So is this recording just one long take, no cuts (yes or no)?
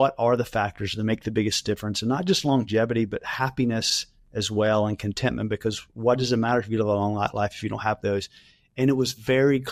yes